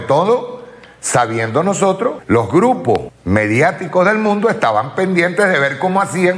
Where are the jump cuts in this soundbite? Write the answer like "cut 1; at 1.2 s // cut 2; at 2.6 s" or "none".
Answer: cut 1; at 2.2 s // cut 2; at 3.1 s